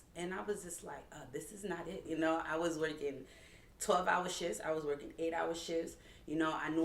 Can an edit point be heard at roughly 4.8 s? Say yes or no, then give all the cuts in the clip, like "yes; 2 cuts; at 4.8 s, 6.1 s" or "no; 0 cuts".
no; 1 cut; at 2.0 s